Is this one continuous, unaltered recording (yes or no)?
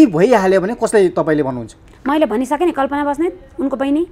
yes